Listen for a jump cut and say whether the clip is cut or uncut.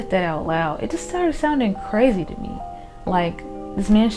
uncut